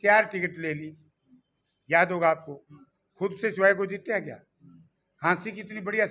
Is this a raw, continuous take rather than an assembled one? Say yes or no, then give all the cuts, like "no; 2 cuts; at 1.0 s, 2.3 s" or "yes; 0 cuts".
yes; 0 cuts